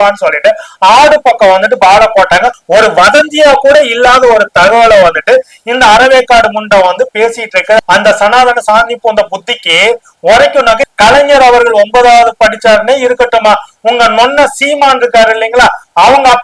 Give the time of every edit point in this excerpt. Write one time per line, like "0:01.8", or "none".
0:02.6
0:07.8
0:10.8